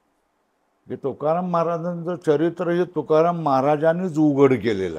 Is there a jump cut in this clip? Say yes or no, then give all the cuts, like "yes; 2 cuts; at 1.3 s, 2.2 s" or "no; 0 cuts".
no; 0 cuts